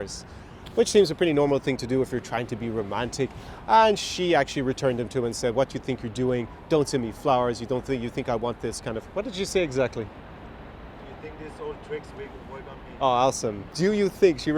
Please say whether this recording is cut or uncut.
cut